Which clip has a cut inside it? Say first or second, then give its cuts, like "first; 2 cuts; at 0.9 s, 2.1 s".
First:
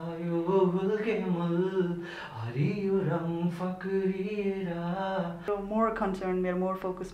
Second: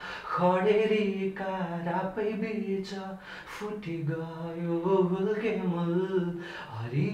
first; 1 cut; at 5.4 s